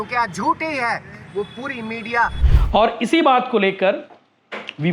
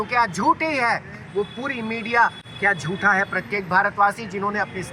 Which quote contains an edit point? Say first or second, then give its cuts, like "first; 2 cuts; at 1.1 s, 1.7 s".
first; 1 cut; at 2.5 s